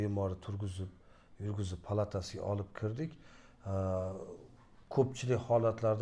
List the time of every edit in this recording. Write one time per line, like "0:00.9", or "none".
none